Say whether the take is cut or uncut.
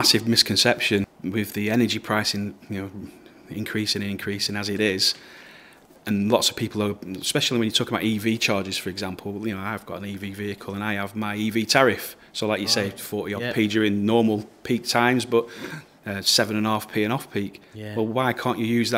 cut